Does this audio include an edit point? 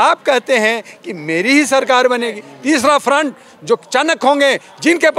yes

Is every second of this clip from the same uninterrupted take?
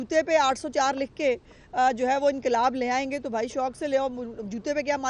yes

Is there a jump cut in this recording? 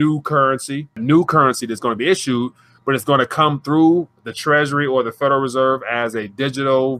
yes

